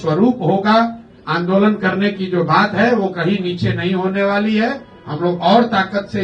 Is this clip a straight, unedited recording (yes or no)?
yes